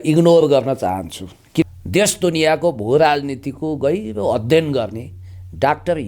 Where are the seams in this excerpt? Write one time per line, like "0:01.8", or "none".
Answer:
0:01.6